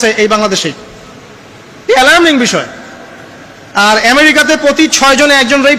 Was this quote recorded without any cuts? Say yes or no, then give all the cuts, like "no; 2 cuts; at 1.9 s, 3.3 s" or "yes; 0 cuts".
yes; 0 cuts